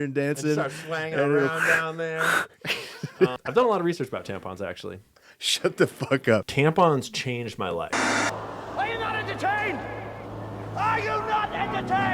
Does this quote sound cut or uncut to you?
cut